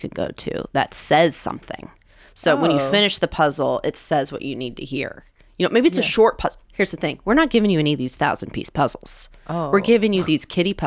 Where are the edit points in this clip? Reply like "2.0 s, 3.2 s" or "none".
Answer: none